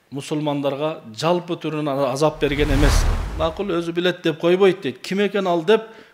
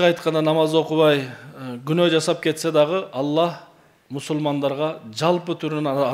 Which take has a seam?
first; 1 cut; at 3.1 s

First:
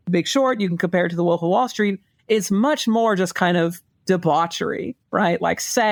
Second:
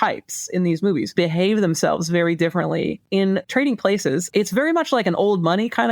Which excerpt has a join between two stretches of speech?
second; 3 cuts; at 1.1 s, 3.2 s, 4.3 s

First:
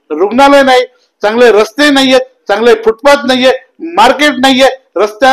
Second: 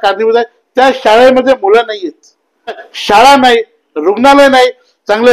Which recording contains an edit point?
second; 1 cut; at 2.9 s

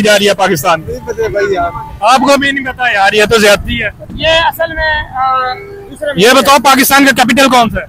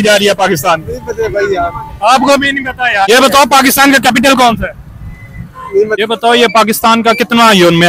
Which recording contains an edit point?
second; 2 cuts; at 3.1 s, 6.0 s

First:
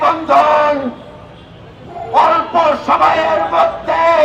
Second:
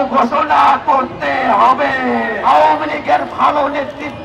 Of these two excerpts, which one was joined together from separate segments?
second; 1 cut; at 2.3 s

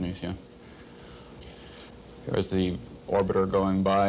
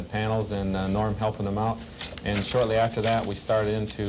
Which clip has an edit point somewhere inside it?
first; 1 cut; at 1.3 s

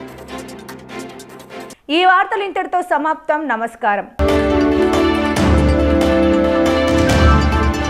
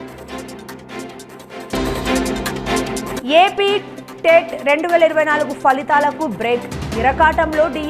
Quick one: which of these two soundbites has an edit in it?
second; 2 cuts; at 1.6 s, 3.2 s

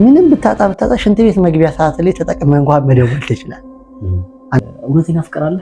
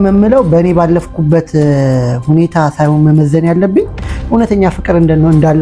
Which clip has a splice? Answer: first; 1 cut; at 4.6 s

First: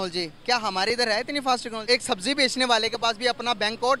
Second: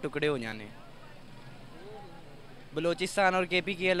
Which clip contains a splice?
first; 1 cut; at 1.7 s

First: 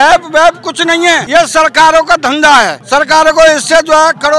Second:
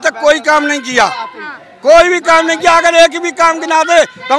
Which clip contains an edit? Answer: first; 2 cuts; at 1.2 s, 2.8 s

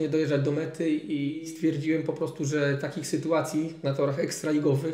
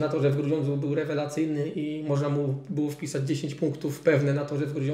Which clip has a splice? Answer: first; 1 cut; at 1.5 s

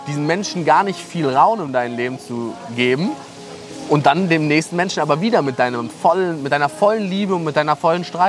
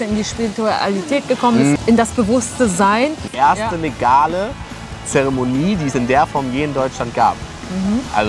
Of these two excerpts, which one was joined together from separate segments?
second; 2 cuts; at 1.8 s, 3.2 s

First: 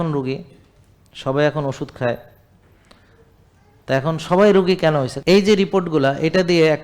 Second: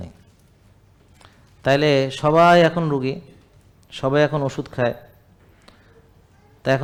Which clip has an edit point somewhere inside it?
first; 1 cut; at 5.1 s

